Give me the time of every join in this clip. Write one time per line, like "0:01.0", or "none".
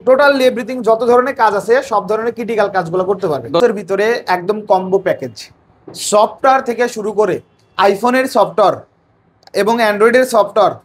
0:03.6